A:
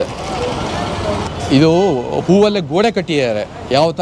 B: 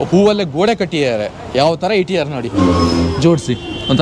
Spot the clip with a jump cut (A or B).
A